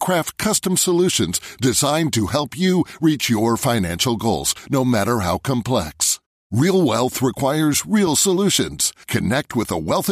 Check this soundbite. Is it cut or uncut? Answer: uncut